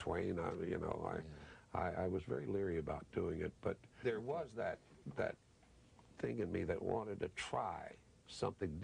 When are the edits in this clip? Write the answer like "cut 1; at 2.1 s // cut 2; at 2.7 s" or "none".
cut 1; at 4.0 s